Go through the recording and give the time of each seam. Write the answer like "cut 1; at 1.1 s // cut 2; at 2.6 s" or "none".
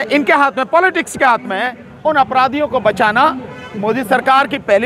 cut 1; at 1.8 s